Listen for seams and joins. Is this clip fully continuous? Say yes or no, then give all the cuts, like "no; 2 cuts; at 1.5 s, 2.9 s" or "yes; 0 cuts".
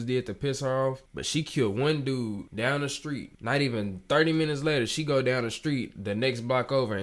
yes; 0 cuts